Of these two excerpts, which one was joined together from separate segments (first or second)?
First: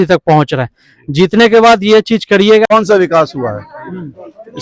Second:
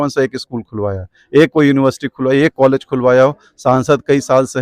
first